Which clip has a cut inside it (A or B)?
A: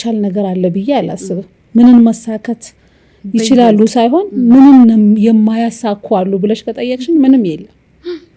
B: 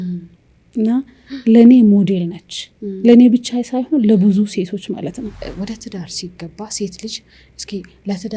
B